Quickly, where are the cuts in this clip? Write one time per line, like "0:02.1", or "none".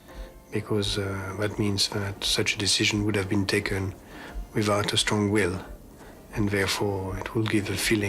0:02.2